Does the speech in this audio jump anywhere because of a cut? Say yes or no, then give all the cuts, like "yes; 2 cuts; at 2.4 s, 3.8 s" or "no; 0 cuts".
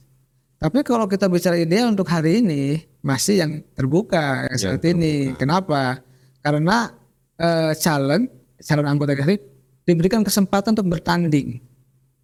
no; 0 cuts